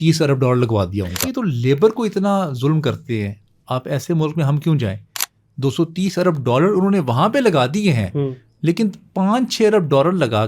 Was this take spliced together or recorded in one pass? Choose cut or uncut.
cut